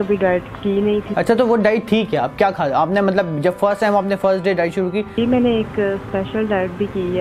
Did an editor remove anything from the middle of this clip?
yes; 2 cuts; at 1.1 s, 5.2 s

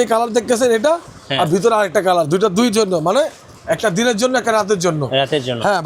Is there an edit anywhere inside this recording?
no; 0 cuts

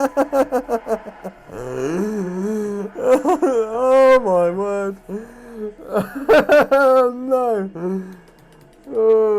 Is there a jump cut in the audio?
no; 0 cuts

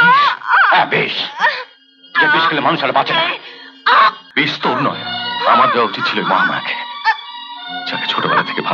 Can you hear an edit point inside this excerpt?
yes; 1 cut; at 4.2 s

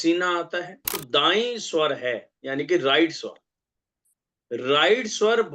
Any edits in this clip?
yes; 1 cut; at 1.0 s

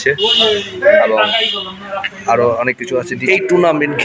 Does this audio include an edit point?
yes; 1 cut; at 3.2 s

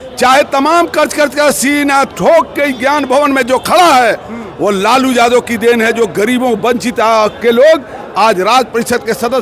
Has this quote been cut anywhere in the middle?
no; 0 cuts

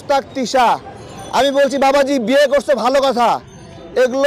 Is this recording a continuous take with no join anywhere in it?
yes; 0 cuts

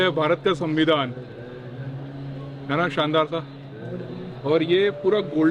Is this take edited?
no; 0 cuts

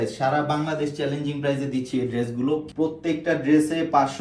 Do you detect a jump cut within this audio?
yes; 1 cut; at 2.7 s

